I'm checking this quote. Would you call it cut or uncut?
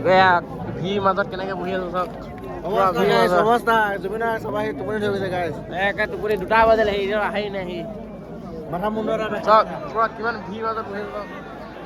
uncut